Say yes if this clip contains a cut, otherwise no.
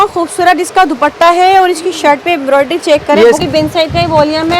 yes